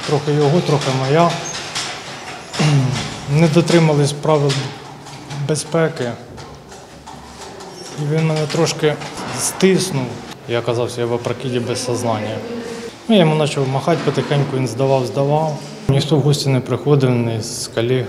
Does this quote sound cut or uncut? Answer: cut